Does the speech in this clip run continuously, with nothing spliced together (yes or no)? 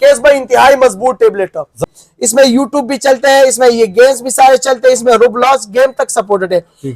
no